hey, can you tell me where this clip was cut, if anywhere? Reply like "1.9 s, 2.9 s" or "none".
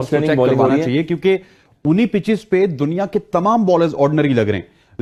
none